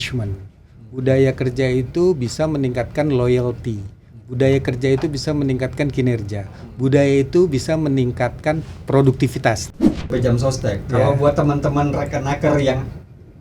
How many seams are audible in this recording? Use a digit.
1